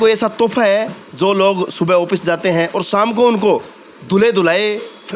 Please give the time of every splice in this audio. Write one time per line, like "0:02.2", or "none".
none